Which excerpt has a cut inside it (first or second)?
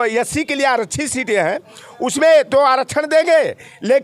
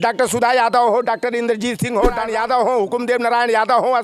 second